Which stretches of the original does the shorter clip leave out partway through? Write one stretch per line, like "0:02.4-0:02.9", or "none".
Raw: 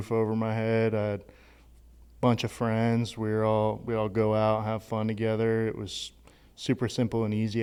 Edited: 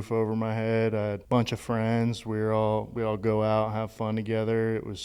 0:01.2-0:02.1